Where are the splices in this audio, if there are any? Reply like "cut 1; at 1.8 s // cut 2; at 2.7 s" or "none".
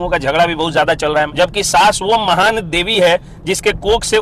cut 1; at 1.3 s